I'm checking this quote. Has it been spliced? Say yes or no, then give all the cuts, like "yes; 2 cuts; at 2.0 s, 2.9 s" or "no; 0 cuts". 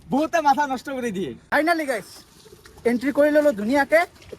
yes; 1 cut; at 1.4 s